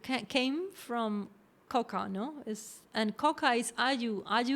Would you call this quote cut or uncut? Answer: uncut